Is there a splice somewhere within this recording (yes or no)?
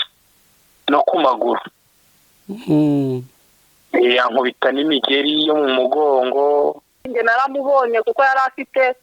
yes